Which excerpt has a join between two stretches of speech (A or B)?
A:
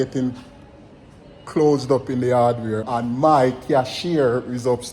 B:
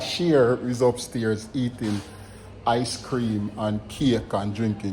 A